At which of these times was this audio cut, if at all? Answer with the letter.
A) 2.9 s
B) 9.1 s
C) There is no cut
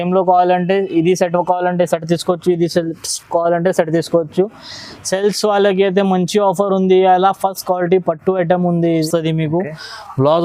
B